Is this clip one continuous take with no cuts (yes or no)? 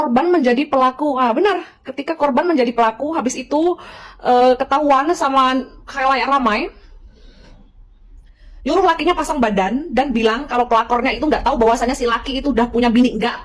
yes